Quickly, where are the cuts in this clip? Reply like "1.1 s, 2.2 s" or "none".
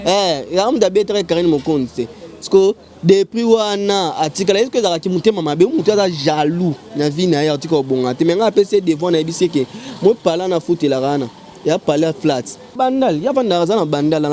12.7 s